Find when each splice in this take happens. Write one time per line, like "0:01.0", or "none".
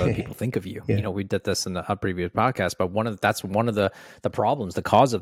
none